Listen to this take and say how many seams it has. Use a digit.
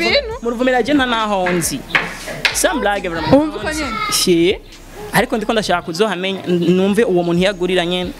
0